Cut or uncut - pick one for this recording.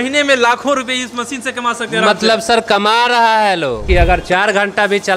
cut